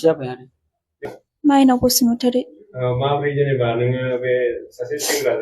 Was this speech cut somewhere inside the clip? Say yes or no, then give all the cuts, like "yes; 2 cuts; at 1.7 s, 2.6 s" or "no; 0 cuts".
yes; 1 cut; at 1.1 s